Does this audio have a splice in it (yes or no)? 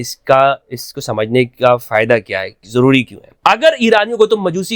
yes